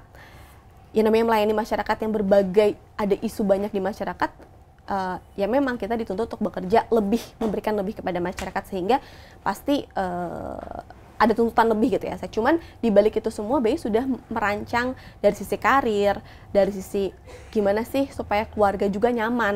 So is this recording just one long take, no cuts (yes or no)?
yes